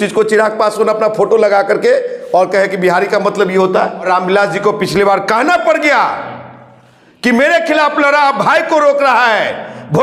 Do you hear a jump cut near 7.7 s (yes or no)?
no